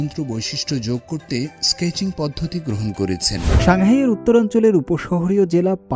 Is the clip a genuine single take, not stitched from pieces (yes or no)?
no